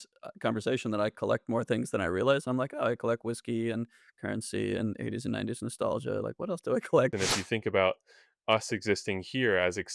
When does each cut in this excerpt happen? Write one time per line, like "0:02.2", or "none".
0:07.1